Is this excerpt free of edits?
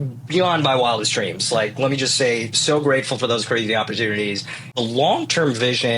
no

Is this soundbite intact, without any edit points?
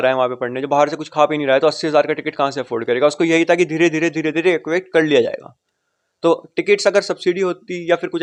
yes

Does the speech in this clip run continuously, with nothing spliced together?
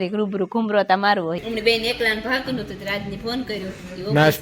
no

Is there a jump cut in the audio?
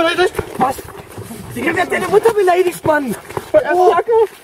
no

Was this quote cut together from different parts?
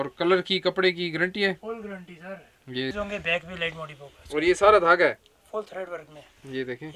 yes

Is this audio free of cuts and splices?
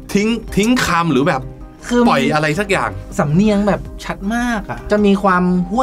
no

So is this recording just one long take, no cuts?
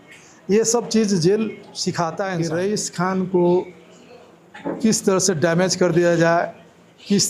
no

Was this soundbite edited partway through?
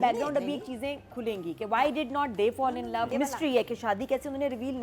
yes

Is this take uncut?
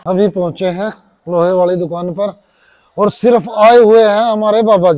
yes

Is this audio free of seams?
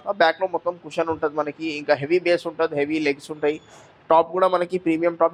yes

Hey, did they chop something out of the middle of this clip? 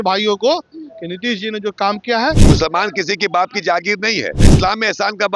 yes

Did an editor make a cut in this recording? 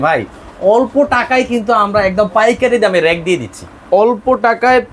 no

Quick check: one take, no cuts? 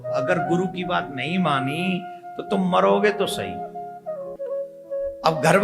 no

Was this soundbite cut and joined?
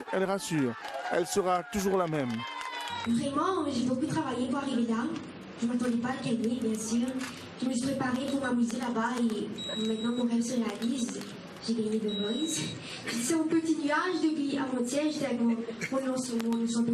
no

